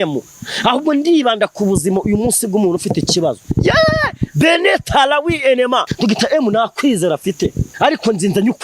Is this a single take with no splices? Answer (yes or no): no